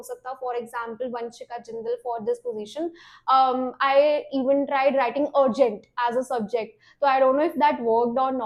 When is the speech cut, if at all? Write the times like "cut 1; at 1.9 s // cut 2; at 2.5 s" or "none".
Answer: none

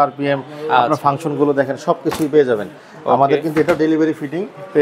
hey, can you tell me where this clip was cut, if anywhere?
none

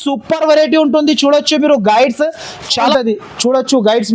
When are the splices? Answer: cut 1; at 2.8 s

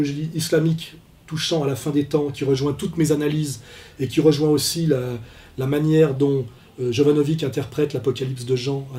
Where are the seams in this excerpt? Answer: cut 1; at 3.8 s

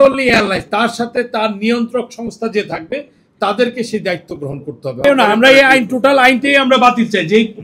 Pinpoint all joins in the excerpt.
cut 1; at 5.0 s

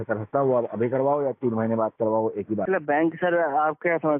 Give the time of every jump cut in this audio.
cut 1; at 2.7 s

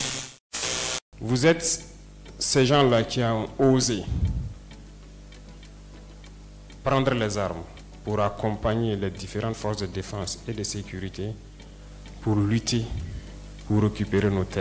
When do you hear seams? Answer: cut 1; at 1.1 s

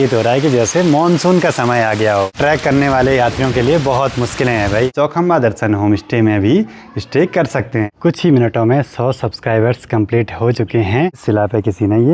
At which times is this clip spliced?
cut 1; at 2.4 s // cut 2; at 4.9 s // cut 3; at 7.9 s // cut 4; at 11.2 s

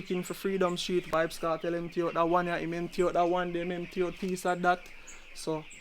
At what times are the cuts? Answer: cut 1; at 1.1 s

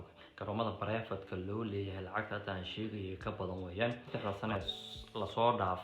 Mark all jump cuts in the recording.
cut 1; at 4.0 s

